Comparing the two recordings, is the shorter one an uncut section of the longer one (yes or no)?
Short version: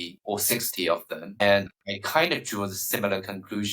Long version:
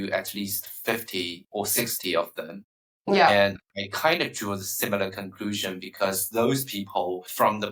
no